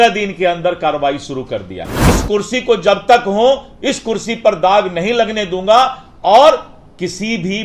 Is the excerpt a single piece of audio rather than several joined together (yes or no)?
no